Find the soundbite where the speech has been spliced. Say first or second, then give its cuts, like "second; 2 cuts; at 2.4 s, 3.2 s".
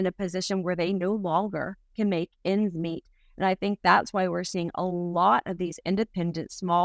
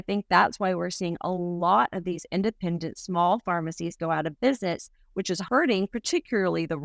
second; 1 cut; at 5.4 s